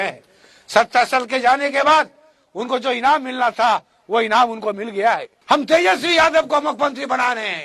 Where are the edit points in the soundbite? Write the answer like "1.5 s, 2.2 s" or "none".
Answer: 5.3 s